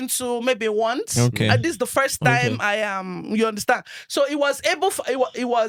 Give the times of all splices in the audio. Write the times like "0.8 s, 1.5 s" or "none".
none